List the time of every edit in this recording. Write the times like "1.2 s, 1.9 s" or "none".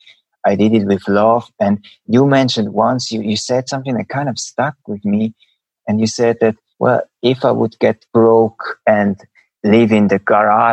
4.4 s, 6.7 s, 8.0 s, 9.1 s